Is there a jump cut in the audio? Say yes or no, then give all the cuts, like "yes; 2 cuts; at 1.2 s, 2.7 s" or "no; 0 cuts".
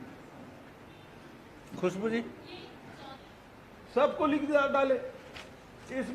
yes; 1 cut; at 3.2 s